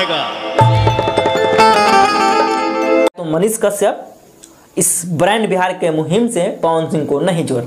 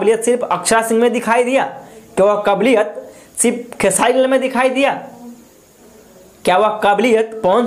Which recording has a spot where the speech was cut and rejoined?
first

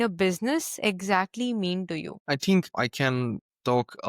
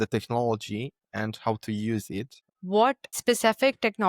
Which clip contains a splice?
second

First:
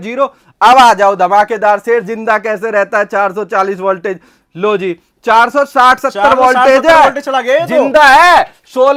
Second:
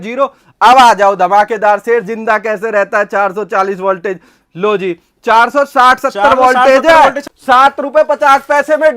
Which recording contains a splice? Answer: second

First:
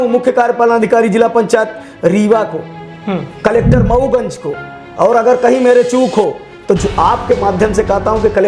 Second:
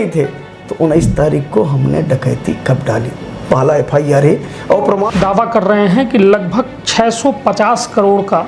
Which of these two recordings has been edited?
second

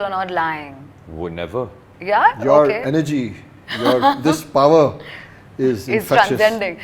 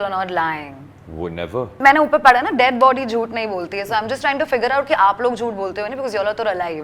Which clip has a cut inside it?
second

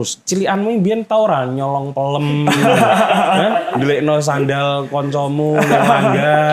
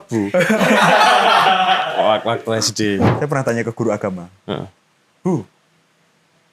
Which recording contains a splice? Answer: second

